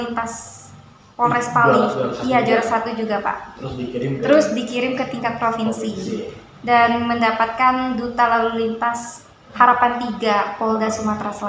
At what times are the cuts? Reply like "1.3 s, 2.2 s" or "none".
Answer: none